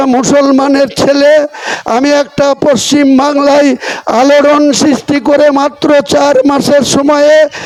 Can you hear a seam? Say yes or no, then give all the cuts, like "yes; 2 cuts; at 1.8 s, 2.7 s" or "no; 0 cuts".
no; 0 cuts